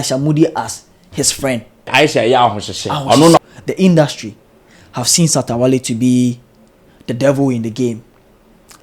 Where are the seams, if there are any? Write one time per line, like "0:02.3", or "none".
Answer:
0:01.9
0:03.4

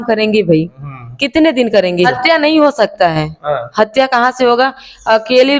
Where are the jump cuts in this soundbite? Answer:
0:02.1

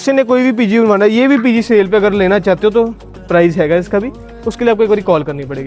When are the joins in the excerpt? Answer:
none

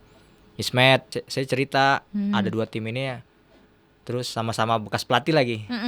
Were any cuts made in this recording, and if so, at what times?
0:01.1

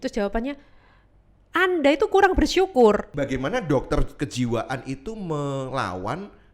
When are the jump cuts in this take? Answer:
0:03.1

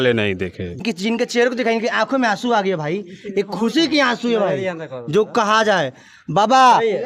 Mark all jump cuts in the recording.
0:00.9

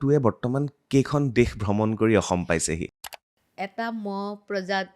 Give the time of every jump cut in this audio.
0:03.0

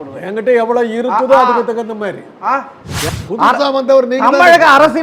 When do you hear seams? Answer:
0:03.0

